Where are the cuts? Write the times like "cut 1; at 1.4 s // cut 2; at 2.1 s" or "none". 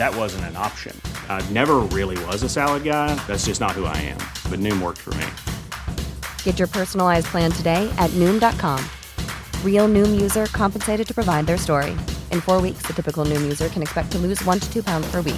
none